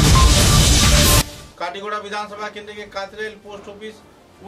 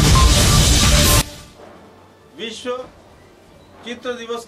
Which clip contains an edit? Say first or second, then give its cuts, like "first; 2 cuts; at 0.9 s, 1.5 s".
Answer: first; 1 cut; at 1.4 s